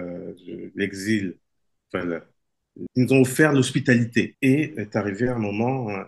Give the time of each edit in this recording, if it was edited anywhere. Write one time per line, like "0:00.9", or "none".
0:02.9
0:04.3